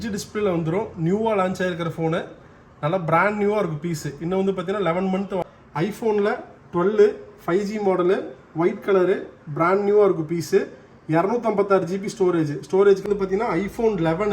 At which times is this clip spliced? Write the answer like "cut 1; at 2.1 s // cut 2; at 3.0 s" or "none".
cut 1; at 5.4 s // cut 2; at 13.1 s